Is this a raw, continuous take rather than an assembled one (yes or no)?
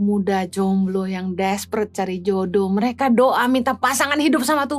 yes